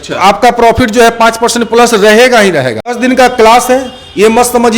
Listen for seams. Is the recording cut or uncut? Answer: cut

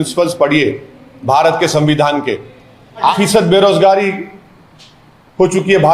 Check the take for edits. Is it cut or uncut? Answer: cut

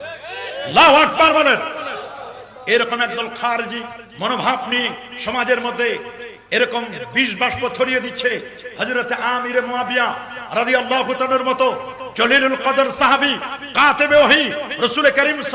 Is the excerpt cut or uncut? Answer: cut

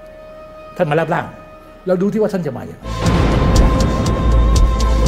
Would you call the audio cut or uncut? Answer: cut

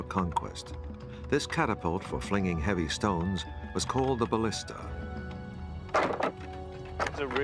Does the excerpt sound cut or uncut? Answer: uncut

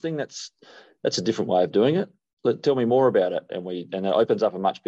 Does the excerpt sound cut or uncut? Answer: uncut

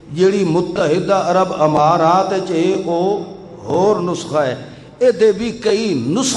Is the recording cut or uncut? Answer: uncut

